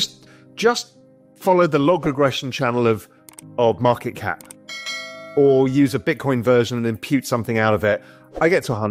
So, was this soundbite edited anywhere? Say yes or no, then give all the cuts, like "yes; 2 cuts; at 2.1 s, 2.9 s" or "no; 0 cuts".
no; 0 cuts